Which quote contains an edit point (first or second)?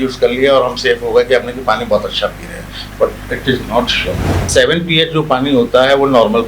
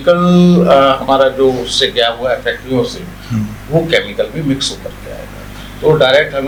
first